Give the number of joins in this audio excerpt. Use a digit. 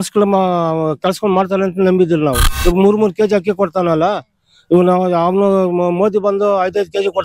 1